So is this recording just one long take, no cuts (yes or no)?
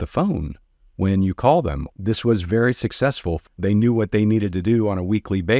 no